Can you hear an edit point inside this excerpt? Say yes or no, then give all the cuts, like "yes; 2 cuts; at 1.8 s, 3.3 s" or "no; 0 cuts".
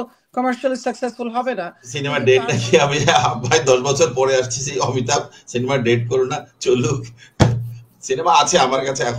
yes; 1 cut; at 1.8 s